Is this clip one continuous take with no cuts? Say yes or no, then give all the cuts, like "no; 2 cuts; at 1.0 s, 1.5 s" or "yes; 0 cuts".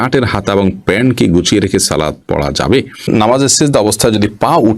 no; 1 cut; at 3.1 s